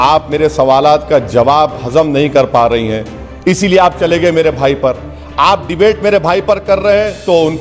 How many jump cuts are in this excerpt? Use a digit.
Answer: 0